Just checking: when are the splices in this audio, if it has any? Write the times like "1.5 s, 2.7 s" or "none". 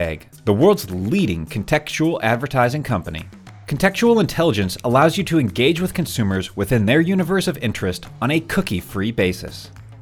none